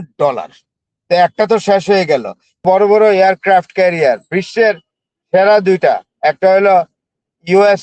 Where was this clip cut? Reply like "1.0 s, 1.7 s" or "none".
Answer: 2.6 s